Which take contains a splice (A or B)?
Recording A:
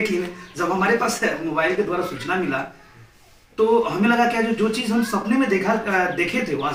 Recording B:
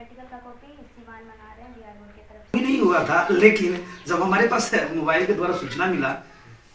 B